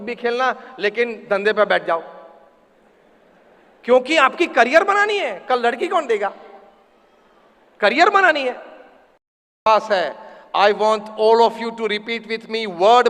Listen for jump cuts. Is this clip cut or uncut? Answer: cut